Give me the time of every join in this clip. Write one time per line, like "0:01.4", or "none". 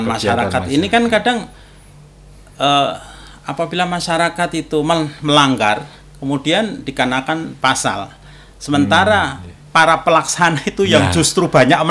none